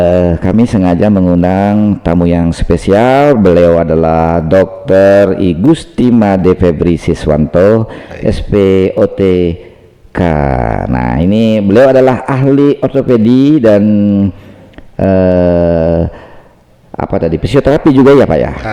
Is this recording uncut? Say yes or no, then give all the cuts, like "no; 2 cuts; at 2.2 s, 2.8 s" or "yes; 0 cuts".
yes; 0 cuts